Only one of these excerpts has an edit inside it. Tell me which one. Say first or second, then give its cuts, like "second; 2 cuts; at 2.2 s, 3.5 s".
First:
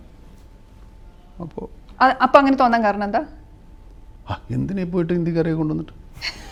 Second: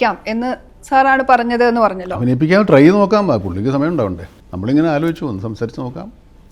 second; 1 cut; at 4.3 s